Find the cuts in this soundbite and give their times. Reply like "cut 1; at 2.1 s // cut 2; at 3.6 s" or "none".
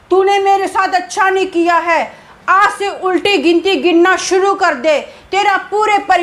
none